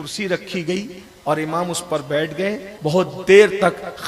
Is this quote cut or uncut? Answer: cut